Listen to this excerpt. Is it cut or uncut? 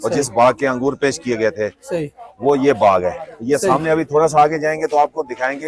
uncut